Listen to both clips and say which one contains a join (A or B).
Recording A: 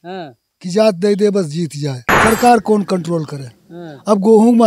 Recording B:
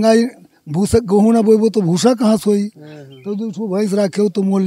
A